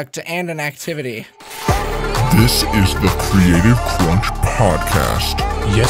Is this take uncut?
no; 1 cut; at 1.5 s

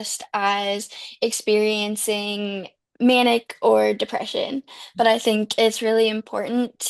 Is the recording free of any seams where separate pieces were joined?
yes; 0 cuts

